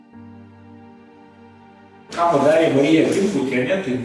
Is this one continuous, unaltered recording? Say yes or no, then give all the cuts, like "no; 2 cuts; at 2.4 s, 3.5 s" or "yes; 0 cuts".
no; 1 cut; at 2.0 s